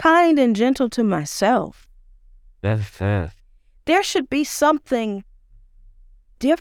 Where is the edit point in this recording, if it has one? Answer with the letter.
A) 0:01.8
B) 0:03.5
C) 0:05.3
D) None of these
D